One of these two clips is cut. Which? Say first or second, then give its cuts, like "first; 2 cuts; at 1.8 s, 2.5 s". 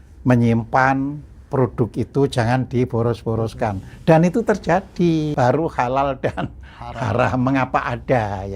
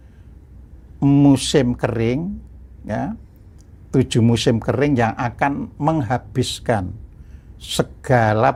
first; 1 cut; at 5.3 s